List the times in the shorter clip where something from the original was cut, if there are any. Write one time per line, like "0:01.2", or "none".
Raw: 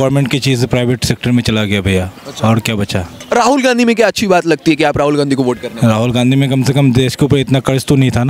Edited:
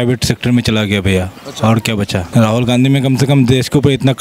0:02.2